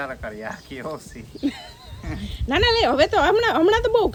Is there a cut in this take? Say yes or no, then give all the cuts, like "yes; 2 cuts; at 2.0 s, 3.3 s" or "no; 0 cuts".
no; 0 cuts